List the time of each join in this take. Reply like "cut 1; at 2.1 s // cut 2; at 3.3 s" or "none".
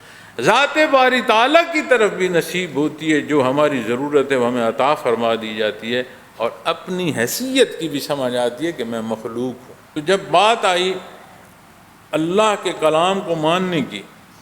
cut 1; at 9.7 s